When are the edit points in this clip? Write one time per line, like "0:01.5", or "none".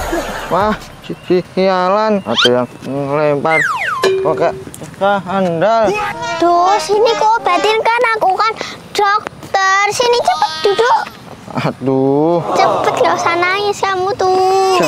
none